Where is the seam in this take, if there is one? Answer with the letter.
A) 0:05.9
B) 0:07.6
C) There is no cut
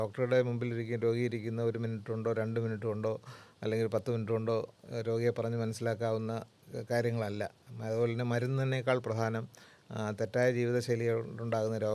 C